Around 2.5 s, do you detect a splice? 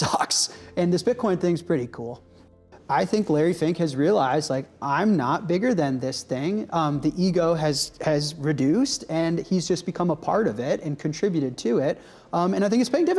yes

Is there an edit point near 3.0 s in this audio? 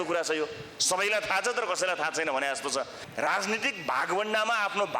yes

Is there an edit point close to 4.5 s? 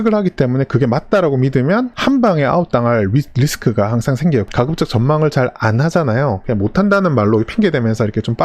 yes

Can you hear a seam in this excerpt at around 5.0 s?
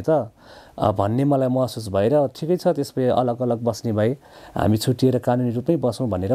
no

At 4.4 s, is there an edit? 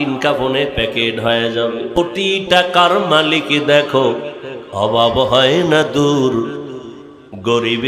no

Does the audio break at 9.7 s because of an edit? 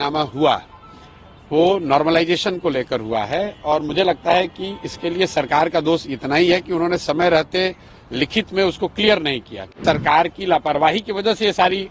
yes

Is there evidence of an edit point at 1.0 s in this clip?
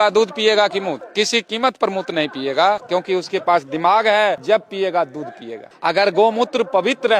no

